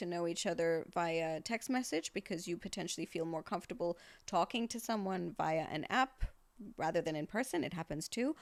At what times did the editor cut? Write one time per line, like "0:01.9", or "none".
none